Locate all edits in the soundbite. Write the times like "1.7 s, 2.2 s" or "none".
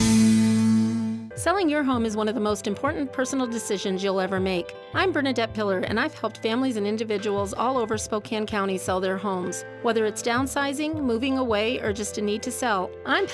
1.3 s